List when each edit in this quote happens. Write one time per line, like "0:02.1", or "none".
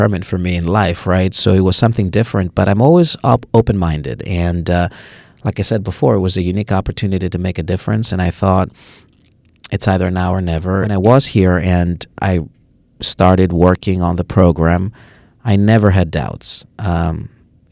0:10.9